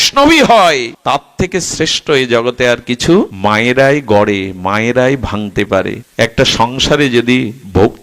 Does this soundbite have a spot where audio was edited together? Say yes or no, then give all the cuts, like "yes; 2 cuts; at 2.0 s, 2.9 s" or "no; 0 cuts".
yes; 3 cuts; at 0.9 s, 3.3 s, 6.0 s